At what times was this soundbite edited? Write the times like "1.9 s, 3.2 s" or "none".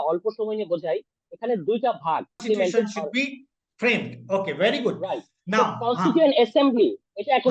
2.4 s